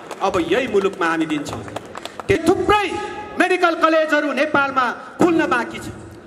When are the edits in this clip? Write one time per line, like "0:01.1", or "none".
0:02.4